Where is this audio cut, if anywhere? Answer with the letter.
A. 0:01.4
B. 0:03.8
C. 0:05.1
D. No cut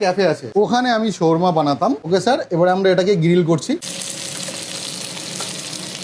B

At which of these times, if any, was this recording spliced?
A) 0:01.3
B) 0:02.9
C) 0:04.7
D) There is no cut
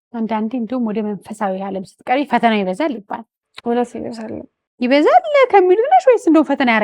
D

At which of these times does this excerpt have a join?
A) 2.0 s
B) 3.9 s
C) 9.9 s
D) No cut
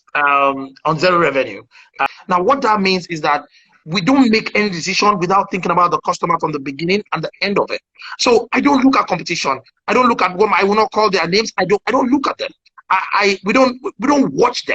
A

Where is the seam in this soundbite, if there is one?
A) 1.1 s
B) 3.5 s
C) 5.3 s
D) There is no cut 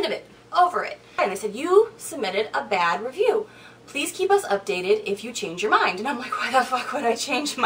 A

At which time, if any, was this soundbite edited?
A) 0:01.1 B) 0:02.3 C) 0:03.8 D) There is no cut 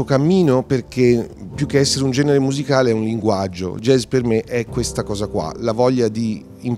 C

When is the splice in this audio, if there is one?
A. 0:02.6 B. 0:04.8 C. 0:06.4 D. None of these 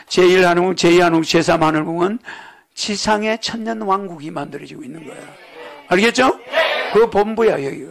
D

